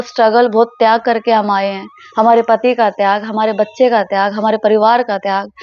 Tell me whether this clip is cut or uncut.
uncut